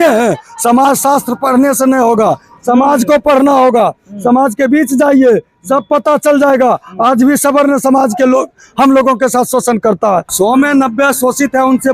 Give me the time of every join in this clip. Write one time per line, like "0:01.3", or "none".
0:10.3